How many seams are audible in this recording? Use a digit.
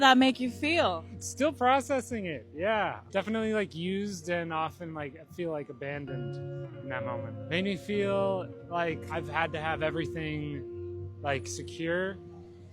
1